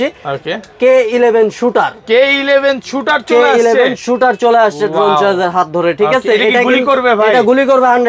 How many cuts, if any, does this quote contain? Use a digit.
0